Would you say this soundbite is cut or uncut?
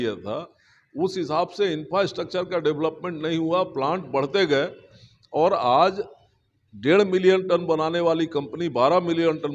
uncut